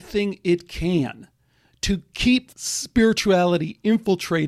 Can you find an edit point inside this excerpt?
yes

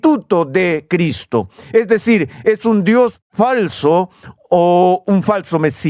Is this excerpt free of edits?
yes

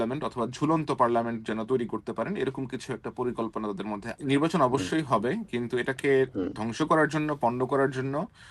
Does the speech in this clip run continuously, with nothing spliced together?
no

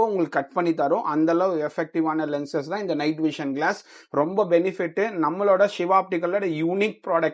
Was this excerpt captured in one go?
yes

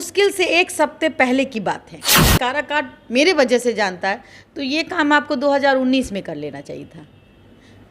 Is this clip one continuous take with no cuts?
no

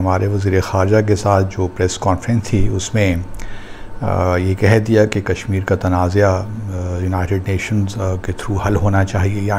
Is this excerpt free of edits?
yes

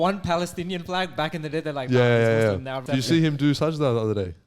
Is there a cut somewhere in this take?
yes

